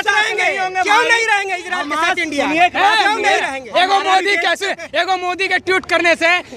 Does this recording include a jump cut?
no; 0 cuts

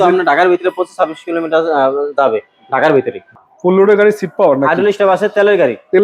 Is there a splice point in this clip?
yes; 1 cut; at 3.3 s

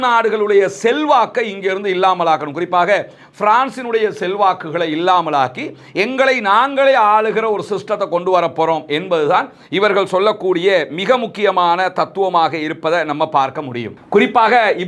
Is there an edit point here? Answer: yes; 1 cut; at 13.9 s

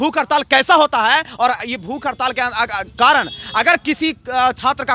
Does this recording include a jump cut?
no; 0 cuts

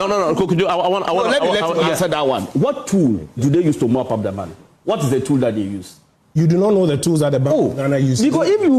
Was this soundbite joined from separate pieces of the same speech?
no; 0 cuts

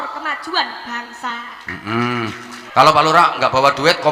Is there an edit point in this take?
yes; 1 cut; at 2.5 s

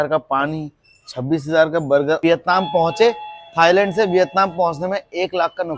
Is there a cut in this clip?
no; 0 cuts

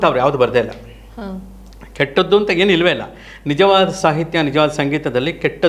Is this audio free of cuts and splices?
yes; 0 cuts

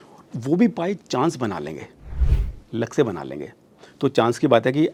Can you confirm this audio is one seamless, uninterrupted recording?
yes; 0 cuts

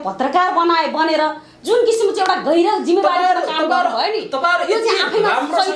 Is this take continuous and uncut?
yes; 0 cuts

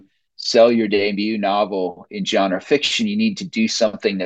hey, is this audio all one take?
yes; 0 cuts

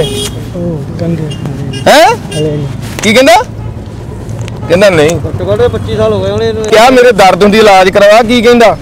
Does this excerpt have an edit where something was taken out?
yes; 1 cut; at 6.7 s

